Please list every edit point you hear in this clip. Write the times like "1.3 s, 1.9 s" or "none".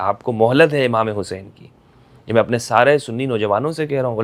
none

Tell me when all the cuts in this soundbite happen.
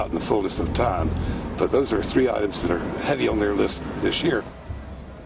none

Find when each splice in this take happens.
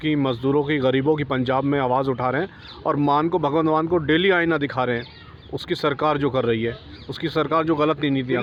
none

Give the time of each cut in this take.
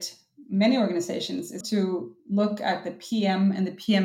1.6 s

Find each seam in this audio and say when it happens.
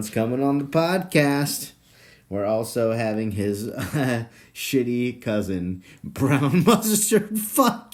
none

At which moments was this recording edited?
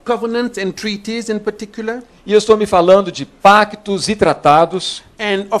4.1 s

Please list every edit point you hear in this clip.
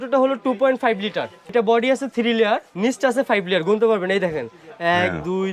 1.4 s, 2.7 s

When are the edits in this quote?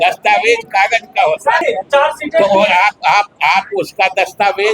1.6 s

